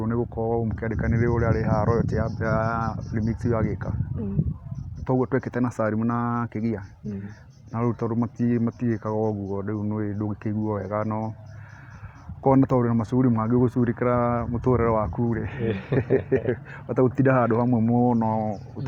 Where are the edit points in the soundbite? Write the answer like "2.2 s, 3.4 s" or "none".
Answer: none

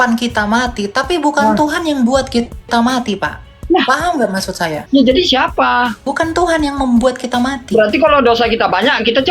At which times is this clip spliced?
4.8 s, 6.0 s

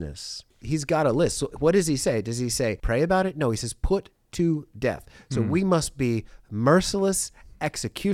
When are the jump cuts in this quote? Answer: 2.8 s

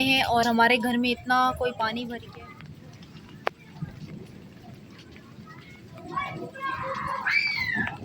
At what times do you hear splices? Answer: 2.2 s

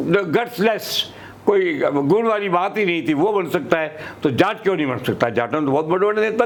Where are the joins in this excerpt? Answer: none

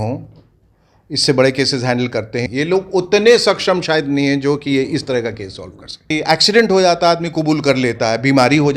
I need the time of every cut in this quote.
2.4 s, 6.1 s

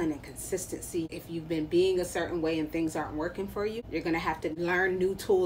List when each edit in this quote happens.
1.2 s, 3.8 s, 4.5 s

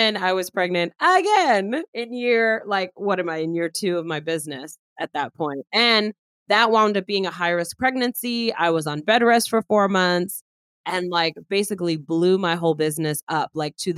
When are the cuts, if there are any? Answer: 1.8 s

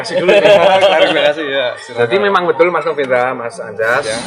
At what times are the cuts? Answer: none

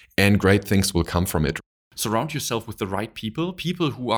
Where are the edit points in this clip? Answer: 1.6 s

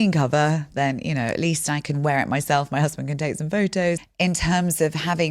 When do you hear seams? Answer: 4.0 s

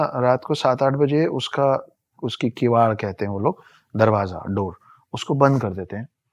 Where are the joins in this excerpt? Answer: none

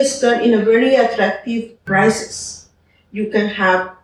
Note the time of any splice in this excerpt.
1.7 s

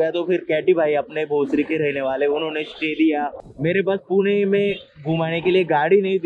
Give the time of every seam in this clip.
3.4 s

